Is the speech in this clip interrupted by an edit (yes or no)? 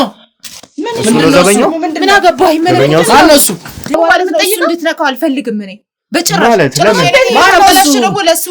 yes